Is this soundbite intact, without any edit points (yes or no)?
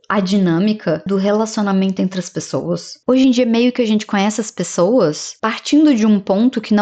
no